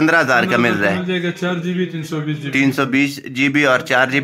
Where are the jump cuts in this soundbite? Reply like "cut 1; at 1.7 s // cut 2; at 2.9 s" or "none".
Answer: none